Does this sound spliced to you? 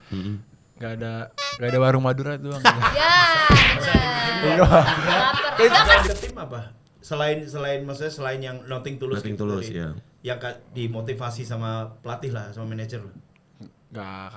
yes; 1 cut; at 6.1 s

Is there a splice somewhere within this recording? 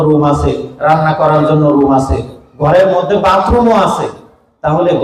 no; 0 cuts

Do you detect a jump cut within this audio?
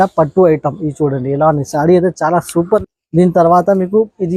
yes; 1 cut; at 2.8 s

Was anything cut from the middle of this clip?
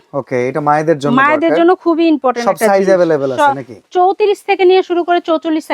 no; 0 cuts

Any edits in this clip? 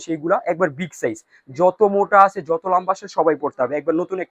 no; 0 cuts

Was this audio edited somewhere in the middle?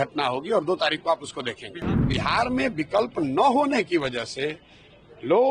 yes; 1 cut; at 1.9 s

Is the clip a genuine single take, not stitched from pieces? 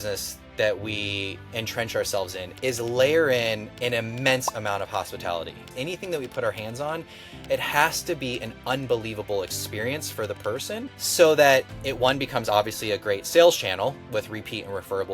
no; 4 cuts; at 2.4 s, 3.7 s, 5.7 s, 11.0 s

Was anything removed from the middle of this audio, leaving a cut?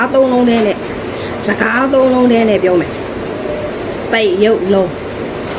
no; 0 cuts

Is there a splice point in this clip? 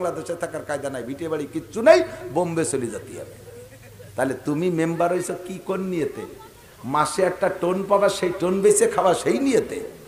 no; 0 cuts

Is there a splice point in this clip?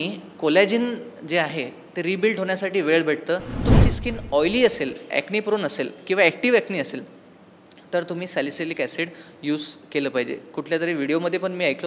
yes; 1 cut; at 3.7 s

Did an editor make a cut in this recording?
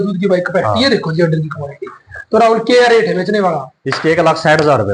no; 0 cuts

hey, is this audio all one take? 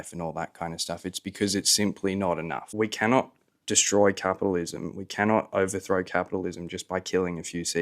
no; 1 cut; at 2.7 s

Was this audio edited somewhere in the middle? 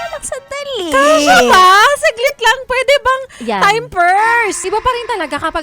yes; 1 cut; at 4.6 s

